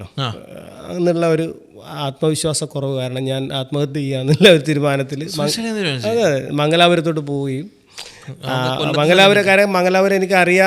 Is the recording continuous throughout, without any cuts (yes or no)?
yes